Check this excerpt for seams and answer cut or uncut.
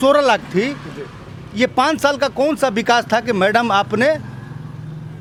uncut